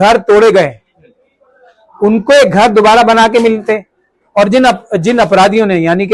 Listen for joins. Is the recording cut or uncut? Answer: uncut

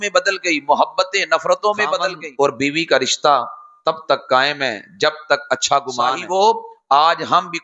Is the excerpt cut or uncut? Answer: cut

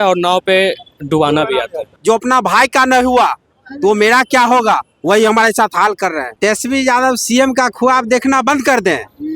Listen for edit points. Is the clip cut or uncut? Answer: cut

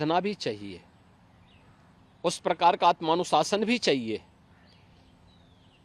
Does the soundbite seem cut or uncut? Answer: uncut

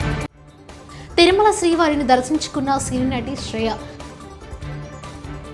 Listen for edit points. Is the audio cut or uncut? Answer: uncut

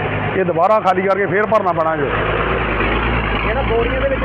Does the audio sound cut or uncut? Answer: uncut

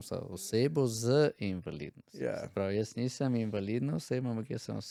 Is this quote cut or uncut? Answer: uncut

